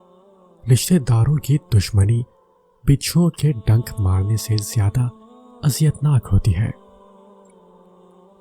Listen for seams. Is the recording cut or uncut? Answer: cut